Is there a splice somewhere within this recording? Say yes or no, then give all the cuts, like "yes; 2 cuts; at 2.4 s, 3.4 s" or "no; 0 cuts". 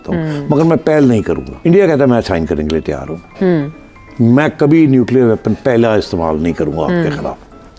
yes; 1 cut; at 1.5 s